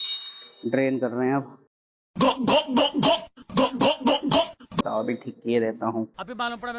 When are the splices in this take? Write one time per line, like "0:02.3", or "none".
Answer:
0:04.8